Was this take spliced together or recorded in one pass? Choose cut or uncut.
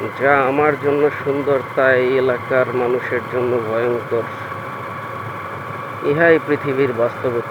uncut